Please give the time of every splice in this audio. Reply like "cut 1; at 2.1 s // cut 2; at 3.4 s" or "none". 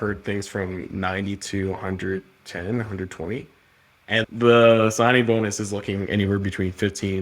cut 1; at 4.1 s